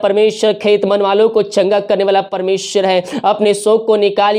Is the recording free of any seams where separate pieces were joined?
yes; 0 cuts

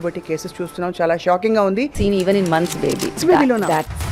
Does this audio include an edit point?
yes; 2 cuts; at 1.9 s, 3.2 s

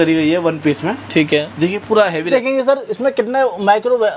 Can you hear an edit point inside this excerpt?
yes; 1 cut; at 2.3 s

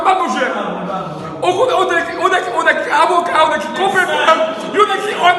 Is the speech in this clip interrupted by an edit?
no; 0 cuts

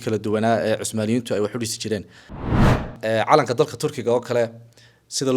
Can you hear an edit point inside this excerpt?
yes; 1 cut; at 2.5 s

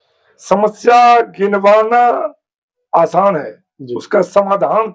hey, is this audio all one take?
yes; 0 cuts

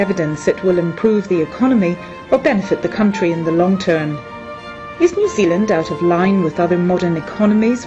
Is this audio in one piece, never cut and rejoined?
yes; 0 cuts

